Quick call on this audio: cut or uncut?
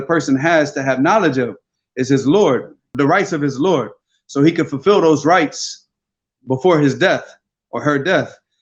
cut